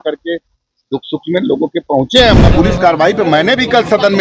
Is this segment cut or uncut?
cut